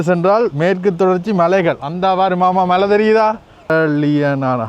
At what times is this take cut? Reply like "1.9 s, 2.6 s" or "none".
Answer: 3.7 s